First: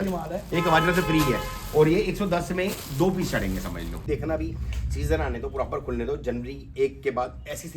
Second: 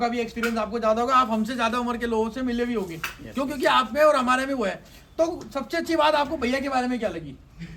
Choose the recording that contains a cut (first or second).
first